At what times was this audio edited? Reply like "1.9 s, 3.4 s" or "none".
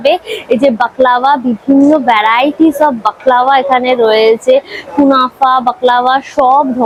none